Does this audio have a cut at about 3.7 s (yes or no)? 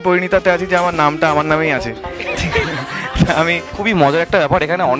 yes